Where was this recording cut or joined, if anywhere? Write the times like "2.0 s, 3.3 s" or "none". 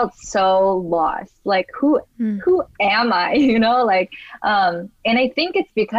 none